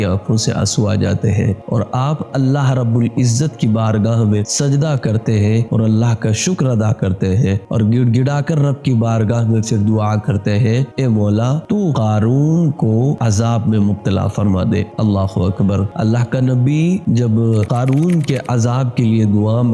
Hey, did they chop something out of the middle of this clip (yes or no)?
no